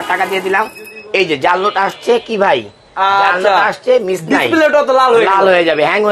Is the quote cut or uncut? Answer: uncut